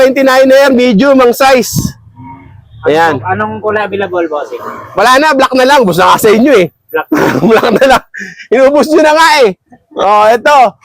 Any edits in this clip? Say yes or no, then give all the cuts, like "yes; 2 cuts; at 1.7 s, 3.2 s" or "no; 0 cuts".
no; 0 cuts